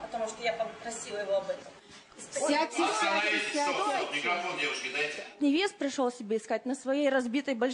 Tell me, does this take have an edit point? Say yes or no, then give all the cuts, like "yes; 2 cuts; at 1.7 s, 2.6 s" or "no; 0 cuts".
yes; 1 cut; at 5.3 s